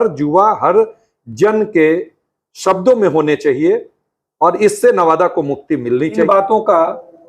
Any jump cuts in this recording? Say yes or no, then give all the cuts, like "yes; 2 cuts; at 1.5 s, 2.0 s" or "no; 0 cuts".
yes; 1 cut; at 6.2 s